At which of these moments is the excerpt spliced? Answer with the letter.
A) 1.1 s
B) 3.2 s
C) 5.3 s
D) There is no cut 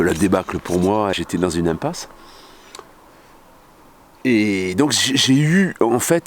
A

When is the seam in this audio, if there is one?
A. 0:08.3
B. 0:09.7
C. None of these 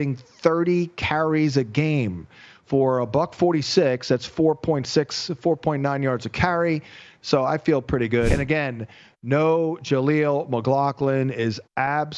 A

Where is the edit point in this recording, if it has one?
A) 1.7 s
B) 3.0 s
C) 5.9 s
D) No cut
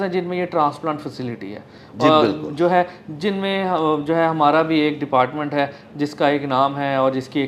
D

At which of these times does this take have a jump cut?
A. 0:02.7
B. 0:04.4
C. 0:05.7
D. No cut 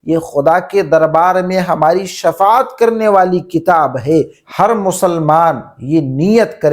B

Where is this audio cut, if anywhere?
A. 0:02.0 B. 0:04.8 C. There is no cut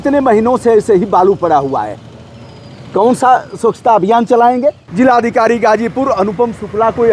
B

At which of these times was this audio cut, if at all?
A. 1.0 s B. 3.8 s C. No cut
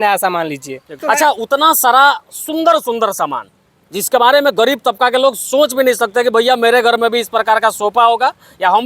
A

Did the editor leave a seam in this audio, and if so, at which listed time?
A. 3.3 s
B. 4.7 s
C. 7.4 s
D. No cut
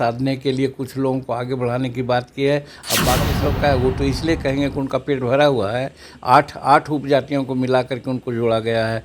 A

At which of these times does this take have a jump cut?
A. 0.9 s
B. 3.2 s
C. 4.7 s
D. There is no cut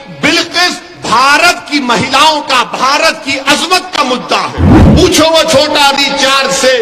C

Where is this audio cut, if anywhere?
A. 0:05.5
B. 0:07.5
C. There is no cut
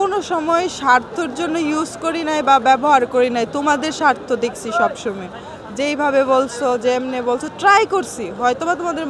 C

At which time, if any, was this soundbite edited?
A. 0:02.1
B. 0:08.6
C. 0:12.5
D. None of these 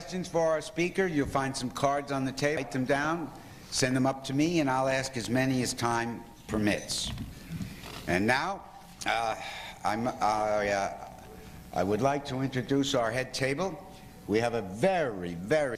A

